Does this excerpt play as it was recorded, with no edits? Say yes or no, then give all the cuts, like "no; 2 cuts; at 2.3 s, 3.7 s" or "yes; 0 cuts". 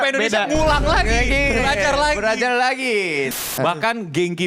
no; 1 cut; at 3.4 s